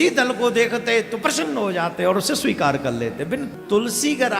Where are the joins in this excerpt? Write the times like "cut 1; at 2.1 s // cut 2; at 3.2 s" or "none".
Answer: cut 1; at 3.5 s